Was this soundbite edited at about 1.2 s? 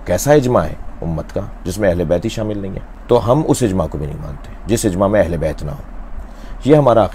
no; 0 cuts

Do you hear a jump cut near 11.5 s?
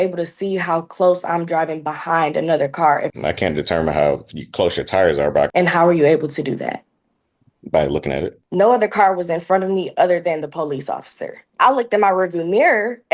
yes; 4 cuts; at 3.1 s, 5.5 s, 8.4 s, 11.5 s

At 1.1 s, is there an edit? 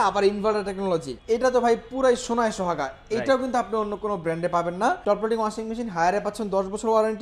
yes; 2 cuts; at 1.1 s, 5.0 s

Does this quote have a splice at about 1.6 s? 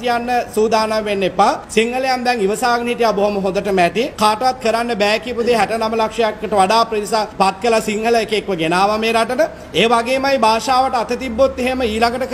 yes; 3 cuts; at 1.6 s, 4.1 s, 7.3 s

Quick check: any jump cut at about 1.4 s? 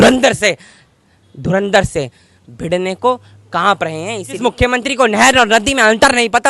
no; 1 cut; at 4.4 s

